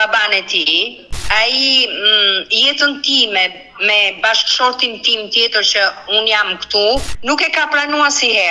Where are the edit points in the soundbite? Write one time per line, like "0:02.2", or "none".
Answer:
0:01.1
0:07.1